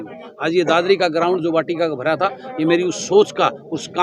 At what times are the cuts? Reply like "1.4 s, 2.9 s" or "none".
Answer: none